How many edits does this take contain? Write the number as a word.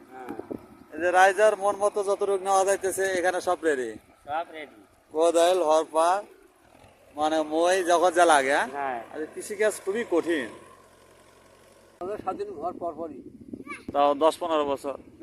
two